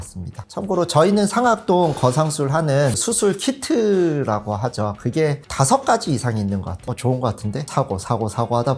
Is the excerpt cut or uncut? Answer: cut